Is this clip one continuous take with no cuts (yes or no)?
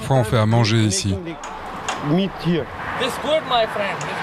yes